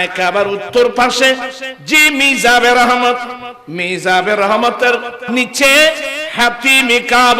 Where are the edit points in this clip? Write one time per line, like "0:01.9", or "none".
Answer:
0:05.3